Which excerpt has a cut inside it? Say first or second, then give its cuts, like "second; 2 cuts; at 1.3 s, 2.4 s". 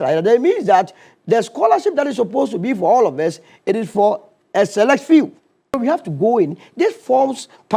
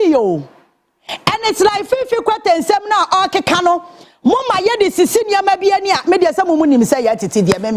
first; 1 cut; at 5.8 s